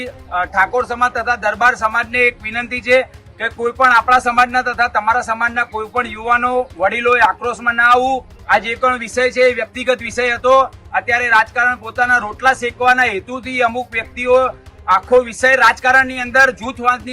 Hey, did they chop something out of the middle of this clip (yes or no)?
yes